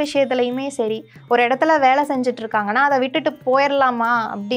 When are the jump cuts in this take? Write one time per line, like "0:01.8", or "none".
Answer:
none